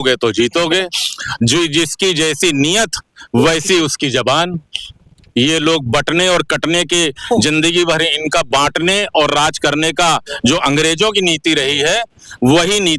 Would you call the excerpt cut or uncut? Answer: uncut